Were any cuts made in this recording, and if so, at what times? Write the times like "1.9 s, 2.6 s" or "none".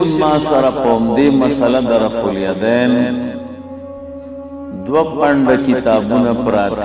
3.5 s, 4.8 s